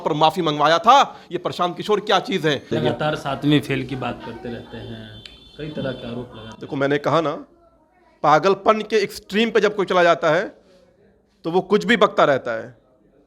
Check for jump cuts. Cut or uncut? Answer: cut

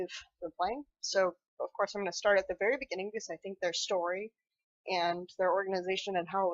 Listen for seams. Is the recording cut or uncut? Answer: uncut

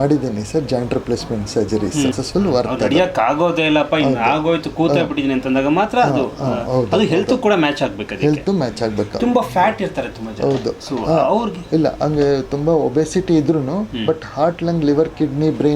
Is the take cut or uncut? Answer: cut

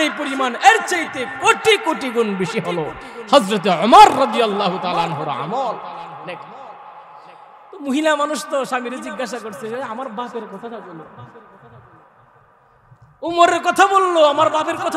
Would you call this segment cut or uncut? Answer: uncut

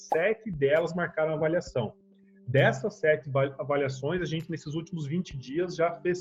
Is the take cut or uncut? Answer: uncut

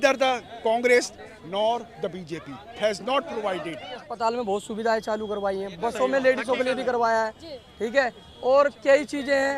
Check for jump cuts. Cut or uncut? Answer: cut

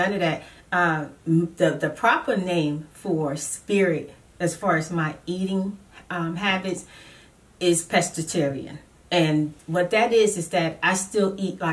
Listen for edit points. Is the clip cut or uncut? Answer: uncut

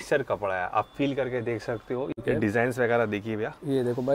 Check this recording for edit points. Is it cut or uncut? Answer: cut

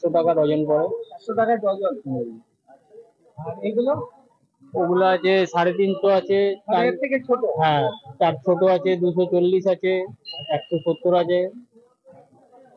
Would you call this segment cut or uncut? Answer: uncut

